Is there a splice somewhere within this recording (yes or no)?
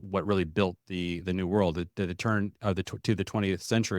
no